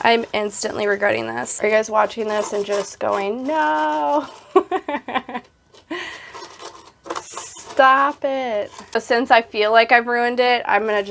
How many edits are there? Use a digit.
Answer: 2